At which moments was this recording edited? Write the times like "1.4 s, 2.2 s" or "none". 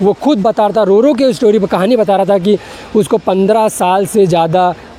none